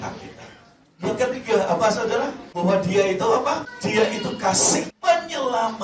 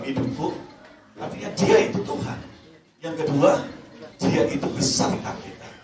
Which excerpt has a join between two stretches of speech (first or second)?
first